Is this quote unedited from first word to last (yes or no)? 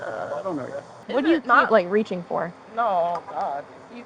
no